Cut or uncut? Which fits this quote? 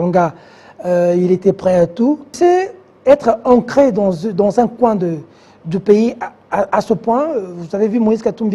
cut